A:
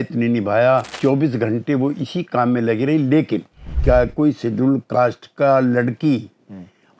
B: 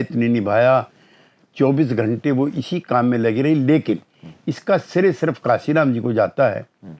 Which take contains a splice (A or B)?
A